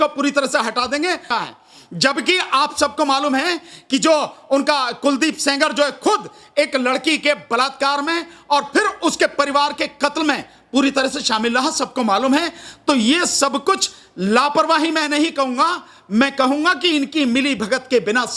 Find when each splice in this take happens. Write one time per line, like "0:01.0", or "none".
0:01.3